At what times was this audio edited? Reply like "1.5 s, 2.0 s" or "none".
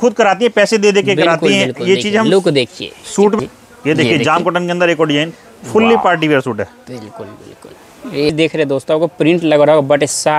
3.4 s, 8.3 s